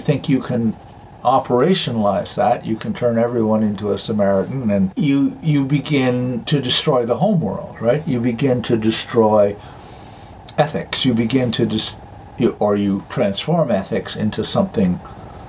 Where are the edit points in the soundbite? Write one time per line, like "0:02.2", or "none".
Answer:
none